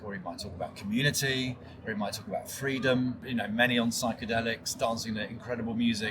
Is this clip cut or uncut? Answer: cut